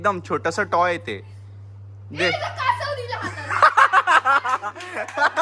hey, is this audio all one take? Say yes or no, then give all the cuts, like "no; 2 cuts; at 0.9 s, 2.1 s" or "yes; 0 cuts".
yes; 0 cuts